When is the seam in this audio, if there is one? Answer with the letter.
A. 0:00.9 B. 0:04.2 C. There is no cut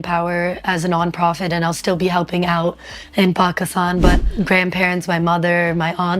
B